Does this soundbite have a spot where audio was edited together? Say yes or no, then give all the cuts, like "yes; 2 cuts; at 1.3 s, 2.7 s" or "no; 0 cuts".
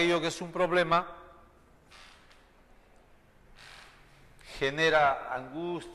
no; 0 cuts